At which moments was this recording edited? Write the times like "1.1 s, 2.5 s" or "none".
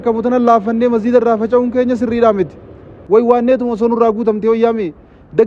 2.9 s